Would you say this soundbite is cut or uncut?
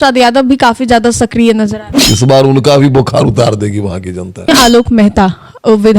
cut